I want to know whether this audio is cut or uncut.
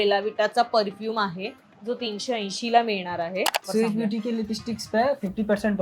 cut